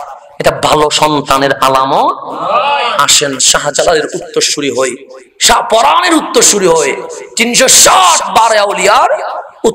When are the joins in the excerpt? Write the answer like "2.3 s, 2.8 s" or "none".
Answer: none